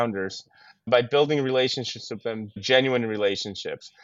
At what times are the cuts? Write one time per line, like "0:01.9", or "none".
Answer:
0:00.9
0:02.6